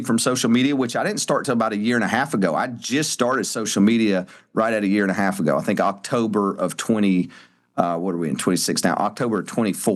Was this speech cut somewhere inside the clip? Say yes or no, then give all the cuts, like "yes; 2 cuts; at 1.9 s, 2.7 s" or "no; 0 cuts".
no; 0 cuts